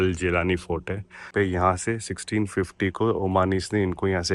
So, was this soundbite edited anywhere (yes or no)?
yes